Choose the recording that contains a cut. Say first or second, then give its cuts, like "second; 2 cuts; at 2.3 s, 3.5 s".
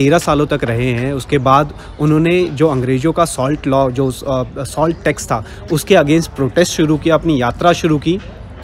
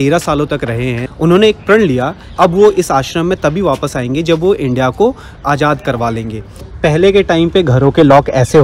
second; 4 cuts; at 1.1 s, 2.3 s, 5.4 s, 6.6 s